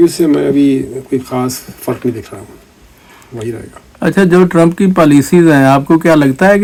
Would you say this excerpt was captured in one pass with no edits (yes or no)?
yes